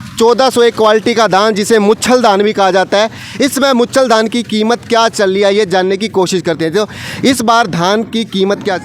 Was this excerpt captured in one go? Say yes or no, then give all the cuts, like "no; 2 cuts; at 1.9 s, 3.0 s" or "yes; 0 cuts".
yes; 0 cuts